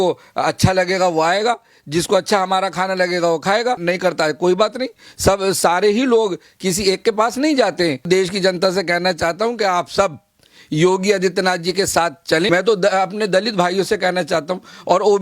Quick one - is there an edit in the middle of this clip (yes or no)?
yes